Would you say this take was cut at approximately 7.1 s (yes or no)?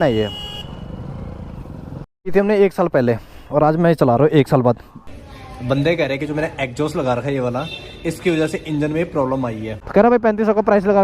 no